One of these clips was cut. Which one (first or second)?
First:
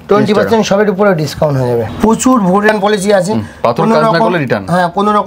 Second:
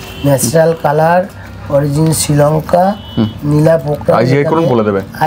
first